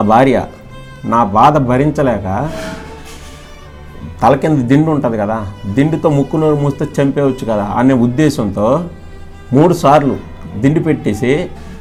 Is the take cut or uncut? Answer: uncut